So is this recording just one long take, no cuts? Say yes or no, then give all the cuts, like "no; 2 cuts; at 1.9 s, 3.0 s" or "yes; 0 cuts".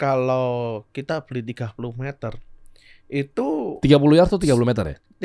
yes; 0 cuts